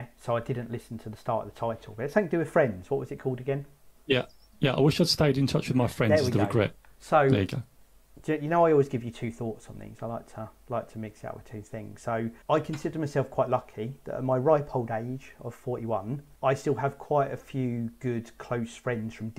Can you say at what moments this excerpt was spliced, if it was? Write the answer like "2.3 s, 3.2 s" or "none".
12.3 s, 16.3 s